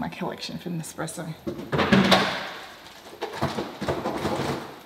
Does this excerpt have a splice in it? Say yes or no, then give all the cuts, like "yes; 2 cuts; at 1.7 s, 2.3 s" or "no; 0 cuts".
yes; 1 cut; at 1.4 s